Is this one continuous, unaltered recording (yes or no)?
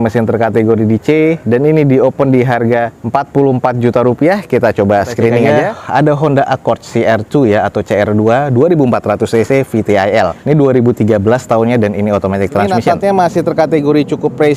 no